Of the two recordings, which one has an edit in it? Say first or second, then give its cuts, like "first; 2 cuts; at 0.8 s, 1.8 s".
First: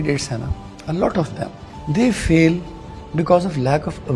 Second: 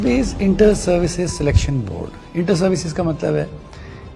first; 1 cut; at 1.7 s